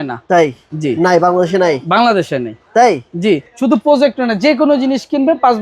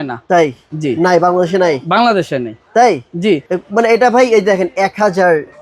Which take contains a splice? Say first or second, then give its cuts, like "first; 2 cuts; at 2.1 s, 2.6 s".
first; 1 cut; at 3.5 s